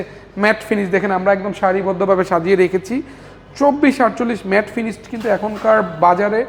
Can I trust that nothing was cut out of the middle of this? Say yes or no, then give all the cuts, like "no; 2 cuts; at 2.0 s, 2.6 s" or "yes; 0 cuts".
yes; 0 cuts